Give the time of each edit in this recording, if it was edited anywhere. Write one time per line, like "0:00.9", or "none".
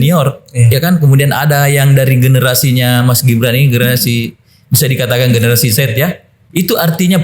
0:06.3